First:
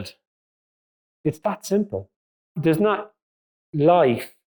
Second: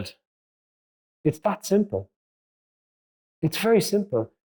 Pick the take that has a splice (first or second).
first